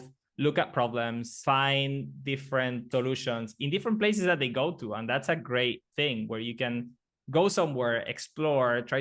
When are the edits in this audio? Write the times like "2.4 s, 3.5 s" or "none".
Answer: 1.3 s, 2.8 s